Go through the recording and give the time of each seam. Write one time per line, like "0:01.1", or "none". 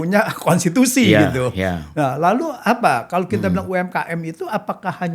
none